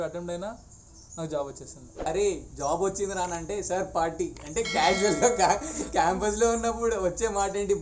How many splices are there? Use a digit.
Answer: 1